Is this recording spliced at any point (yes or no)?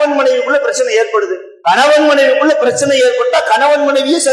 yes